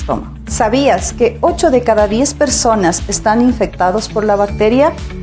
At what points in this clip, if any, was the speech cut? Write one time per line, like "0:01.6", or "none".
none

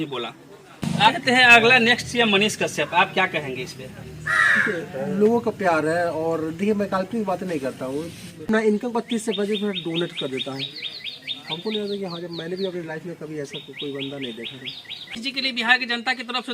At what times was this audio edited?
0:01.0
0:08.4
0:15.2

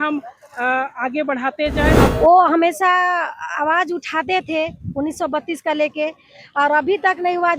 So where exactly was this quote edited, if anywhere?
0:02.1

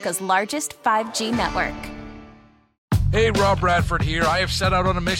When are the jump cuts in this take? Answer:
0:02.8

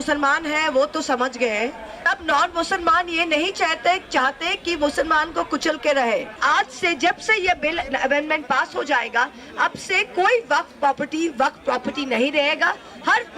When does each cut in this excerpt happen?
0:02.1
0:06.4

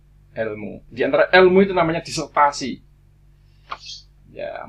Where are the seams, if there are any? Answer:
none

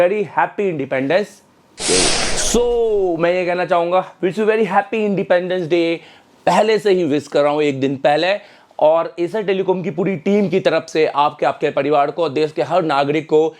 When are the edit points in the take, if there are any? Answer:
0:02.4

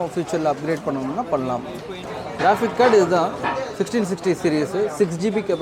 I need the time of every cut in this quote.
0:02.0

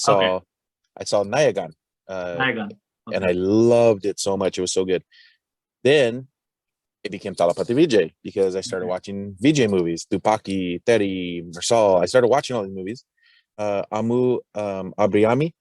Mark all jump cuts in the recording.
0:13.4

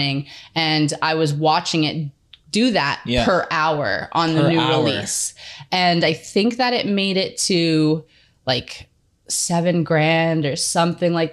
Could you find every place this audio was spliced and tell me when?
none

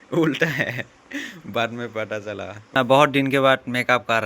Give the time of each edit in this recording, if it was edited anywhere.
0:02.8

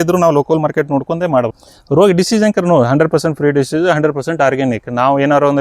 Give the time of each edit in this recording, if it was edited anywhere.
0:01.6

